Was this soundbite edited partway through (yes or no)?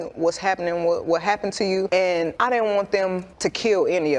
yes